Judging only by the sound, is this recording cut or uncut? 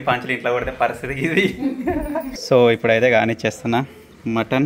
cut